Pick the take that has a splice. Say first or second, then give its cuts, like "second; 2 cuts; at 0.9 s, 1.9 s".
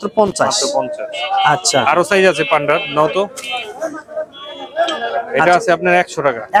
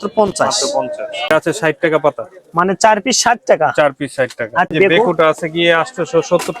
second; 2 cuts; at 1.3 s, 4.7 s